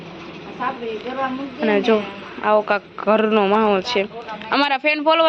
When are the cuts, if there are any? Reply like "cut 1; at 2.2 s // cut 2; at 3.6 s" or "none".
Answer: none